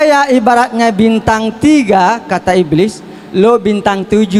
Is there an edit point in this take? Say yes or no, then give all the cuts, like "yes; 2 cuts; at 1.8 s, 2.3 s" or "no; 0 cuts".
no; 0 cuts